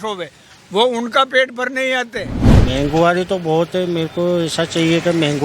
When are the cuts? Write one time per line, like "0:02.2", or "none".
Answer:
0:02.4